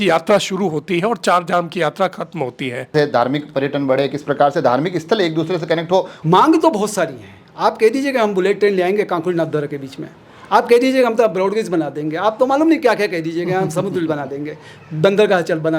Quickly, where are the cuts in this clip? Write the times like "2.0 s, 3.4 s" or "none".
2.9 s, 6.1 s